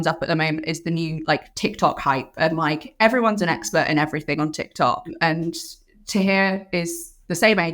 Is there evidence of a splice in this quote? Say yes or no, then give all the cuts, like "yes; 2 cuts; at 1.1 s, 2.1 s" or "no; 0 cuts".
yes; 2 cuts; at 1.5 s, 5.1 s